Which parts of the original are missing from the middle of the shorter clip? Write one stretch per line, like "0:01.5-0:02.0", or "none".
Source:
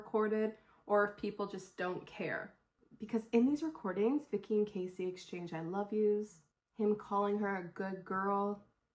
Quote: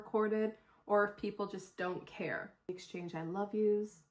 0:02.8-0:05.2